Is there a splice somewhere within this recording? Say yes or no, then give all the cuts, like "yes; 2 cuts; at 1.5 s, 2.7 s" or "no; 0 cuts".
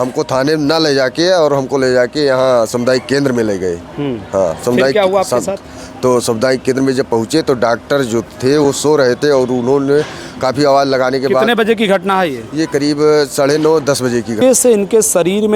yes; 1 cut; at 14.4 s